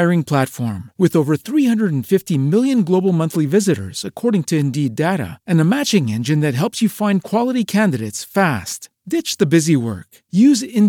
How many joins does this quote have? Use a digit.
0